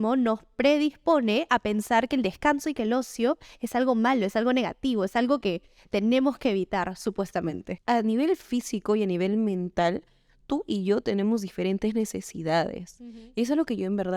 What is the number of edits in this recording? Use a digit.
1